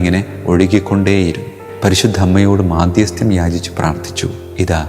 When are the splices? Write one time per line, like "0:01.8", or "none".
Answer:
0:01.6